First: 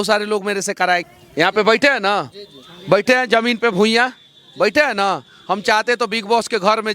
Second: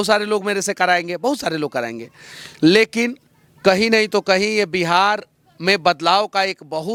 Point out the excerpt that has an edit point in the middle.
first; 1 cut; at 1.1 s

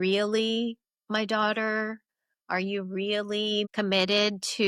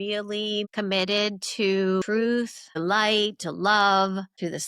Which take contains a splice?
second; 1 cut; at 2.6 s

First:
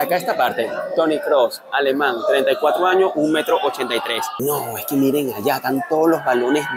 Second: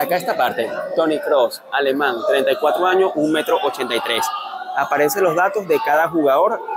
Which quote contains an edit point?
first; 1 cut; at 4.3 s

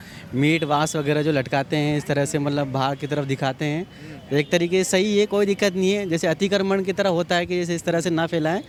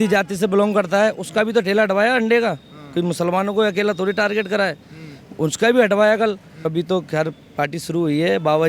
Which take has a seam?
second; 1 cut; at 6.7 s

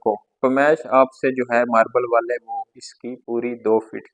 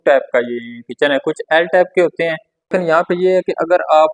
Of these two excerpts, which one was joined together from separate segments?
second; 1 cut; at 2.7 s

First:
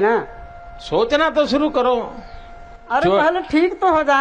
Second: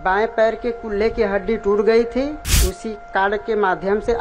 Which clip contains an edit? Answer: second; 1 cut; at 2.5 s

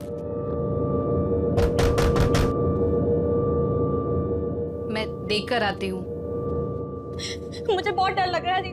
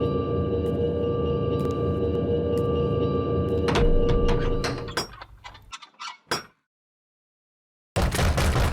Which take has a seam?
second; 1 cut; at 4.8 s

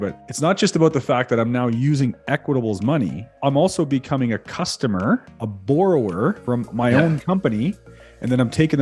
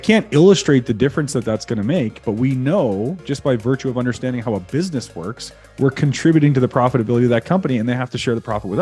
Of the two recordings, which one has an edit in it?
first; 2 cuts; at 3.4 s, 6.4 s

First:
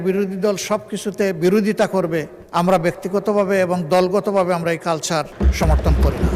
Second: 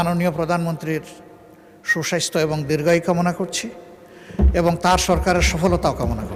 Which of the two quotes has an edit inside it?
first; 2 cuts; at 2.4 s, 5.3 s

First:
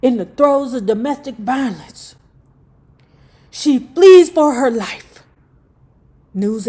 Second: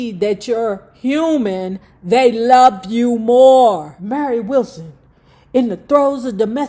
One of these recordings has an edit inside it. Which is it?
second; 1 cut; at 4.0 s

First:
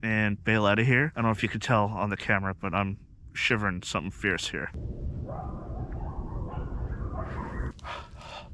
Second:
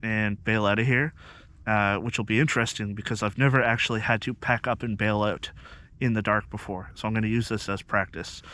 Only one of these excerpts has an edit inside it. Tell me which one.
first; 3 cuts; at 1.1 s, 4.8 s, 7.7 s

